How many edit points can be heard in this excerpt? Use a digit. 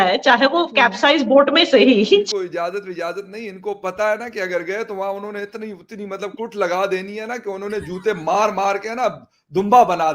1